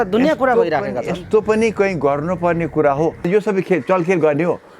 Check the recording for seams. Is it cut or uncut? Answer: cut